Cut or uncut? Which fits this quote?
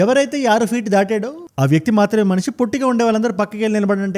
uncut